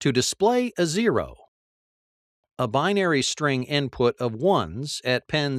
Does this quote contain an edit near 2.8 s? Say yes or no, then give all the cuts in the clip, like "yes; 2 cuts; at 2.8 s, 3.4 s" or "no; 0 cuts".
yes; 1 cut; at 2.8 s